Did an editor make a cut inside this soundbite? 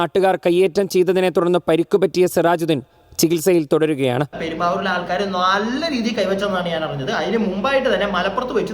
yes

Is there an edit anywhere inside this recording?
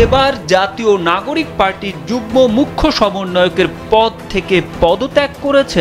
no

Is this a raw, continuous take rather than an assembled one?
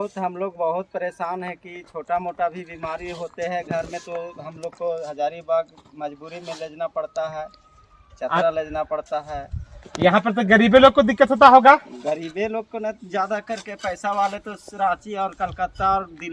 yes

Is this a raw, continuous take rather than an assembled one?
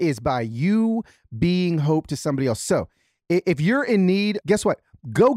no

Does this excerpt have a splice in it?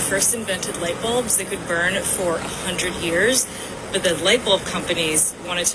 no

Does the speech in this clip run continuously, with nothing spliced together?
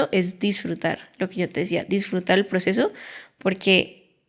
yes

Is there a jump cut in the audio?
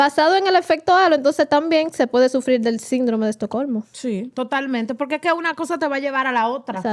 yes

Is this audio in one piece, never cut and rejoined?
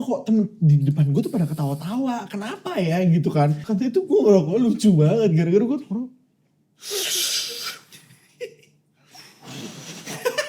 no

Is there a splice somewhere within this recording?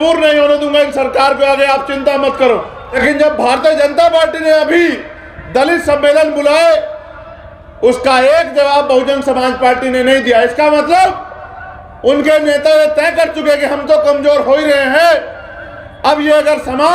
yes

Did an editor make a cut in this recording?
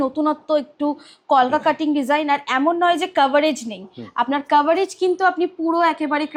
no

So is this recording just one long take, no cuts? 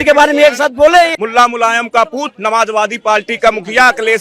no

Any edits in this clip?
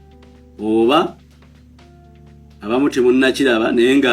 yes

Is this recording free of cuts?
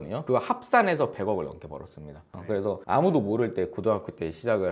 no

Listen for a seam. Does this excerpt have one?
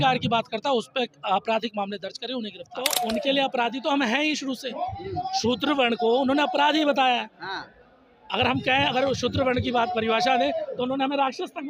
yes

